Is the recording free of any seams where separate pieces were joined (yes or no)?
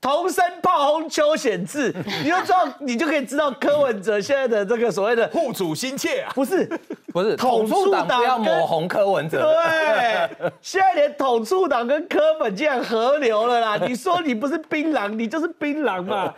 yes